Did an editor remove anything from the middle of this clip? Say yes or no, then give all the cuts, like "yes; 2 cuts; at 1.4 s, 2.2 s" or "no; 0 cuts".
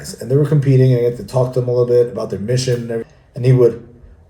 yes; 1 cut; at 3.1 s